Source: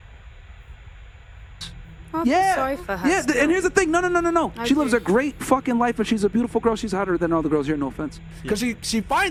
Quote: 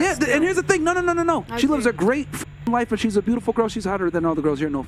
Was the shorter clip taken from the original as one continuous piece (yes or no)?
yes